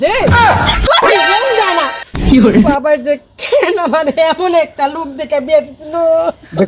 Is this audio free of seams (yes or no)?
yes